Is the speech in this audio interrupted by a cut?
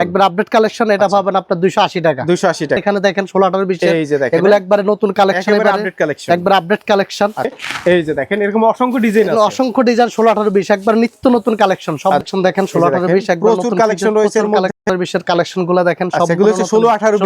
no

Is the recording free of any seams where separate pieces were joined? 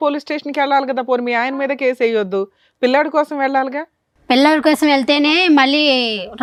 yes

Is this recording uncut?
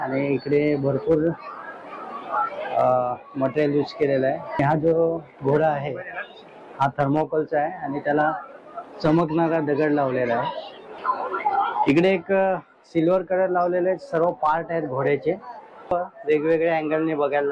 no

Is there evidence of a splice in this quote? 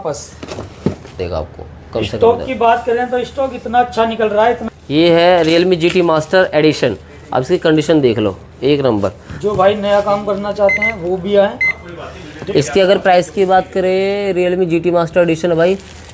yes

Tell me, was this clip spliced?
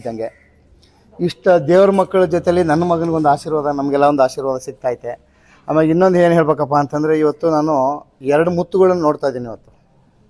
no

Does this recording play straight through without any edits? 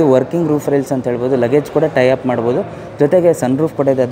yes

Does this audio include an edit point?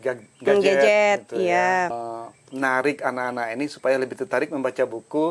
yes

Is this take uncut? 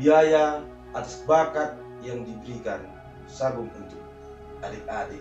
yes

